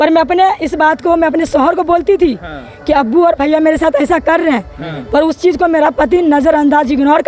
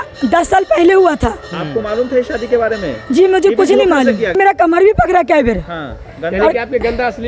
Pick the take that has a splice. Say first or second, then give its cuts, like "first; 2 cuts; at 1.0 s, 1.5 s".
second; 1 cut; at 4.3 s